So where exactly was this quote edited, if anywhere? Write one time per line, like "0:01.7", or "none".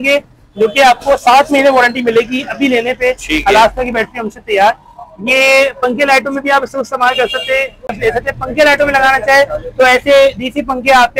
0:07.9

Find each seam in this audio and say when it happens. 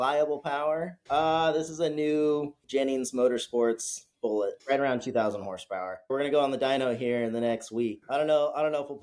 0:00.9
0:02.6
0:04.6
0:06.1
0:08.0

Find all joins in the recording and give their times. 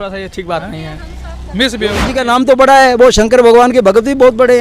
0:02.1

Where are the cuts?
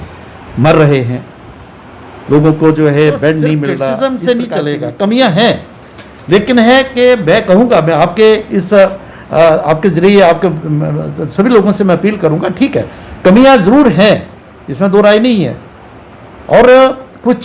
0:03.9

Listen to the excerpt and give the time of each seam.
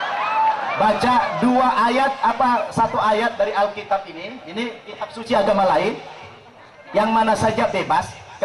none

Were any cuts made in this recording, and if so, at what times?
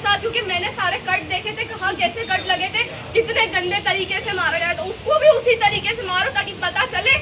none

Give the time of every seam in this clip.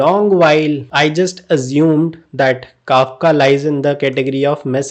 none

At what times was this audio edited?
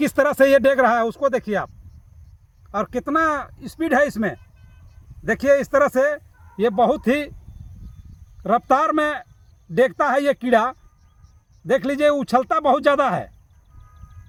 none

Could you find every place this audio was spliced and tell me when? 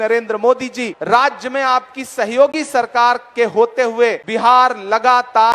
0:00.9
0:04.2

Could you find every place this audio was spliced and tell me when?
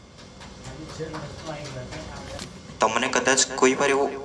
0:02.4

